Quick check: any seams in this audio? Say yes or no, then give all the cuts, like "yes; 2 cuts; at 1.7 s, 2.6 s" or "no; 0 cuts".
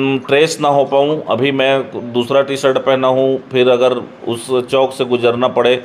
no; 0 cuts